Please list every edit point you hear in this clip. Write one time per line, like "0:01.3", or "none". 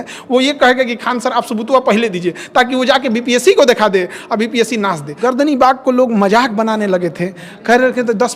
0:05.1